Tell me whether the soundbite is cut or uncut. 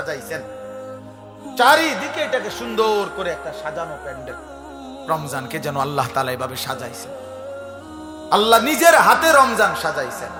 uncut